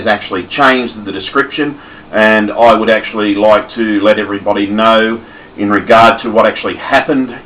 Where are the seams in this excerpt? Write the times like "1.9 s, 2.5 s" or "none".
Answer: none